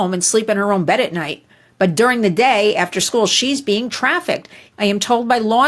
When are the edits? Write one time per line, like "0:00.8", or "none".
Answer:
0:04.6